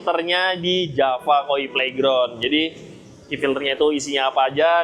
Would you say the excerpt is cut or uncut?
uncut